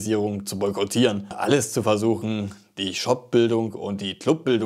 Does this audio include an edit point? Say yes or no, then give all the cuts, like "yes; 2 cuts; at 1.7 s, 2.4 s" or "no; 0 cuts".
yes; 1 cut; at 1.3 s